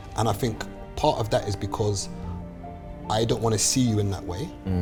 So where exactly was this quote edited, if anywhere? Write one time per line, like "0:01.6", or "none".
none